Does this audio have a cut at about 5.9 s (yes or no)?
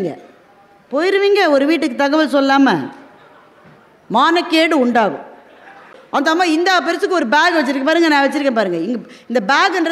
yes